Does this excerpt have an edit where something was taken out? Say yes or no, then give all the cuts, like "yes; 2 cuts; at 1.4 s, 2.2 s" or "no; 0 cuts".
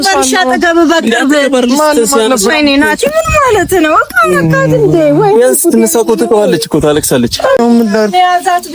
yes; 1 cut; at 7.6 s